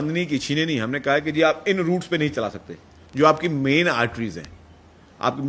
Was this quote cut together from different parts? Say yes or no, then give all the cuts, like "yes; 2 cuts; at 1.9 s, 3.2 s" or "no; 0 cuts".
no; 0 cuts